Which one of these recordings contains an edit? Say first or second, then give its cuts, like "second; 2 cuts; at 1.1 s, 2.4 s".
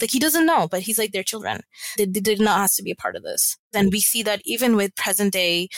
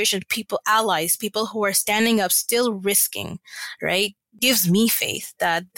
first; 1 cut; at 3.7 s